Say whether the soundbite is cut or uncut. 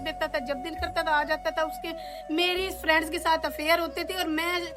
uncut